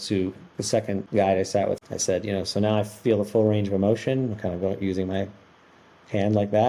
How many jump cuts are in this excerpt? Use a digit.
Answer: 2